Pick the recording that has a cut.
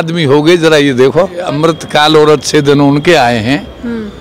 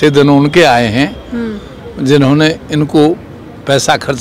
first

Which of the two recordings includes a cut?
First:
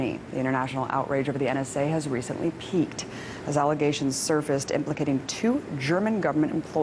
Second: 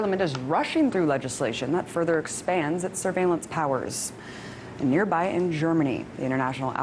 second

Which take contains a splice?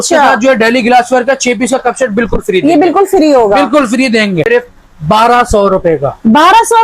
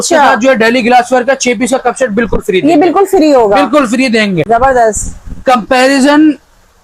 first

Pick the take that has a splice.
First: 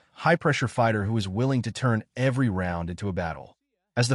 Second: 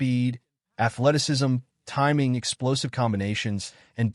second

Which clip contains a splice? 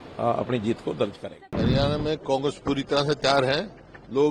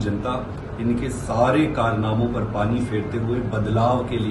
first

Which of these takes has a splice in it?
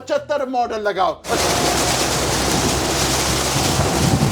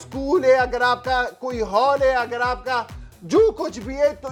first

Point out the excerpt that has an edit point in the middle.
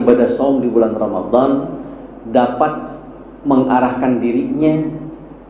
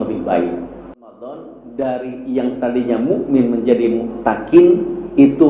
second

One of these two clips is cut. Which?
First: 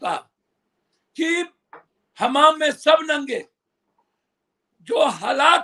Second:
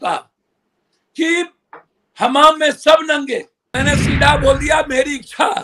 second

